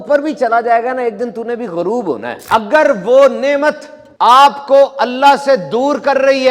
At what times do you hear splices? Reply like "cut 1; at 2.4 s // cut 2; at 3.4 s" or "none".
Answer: cut 1; at 2.3 s